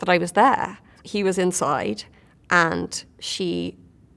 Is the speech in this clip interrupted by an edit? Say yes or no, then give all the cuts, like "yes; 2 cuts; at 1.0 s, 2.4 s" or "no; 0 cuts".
yes; 1 cut; at 1.0 s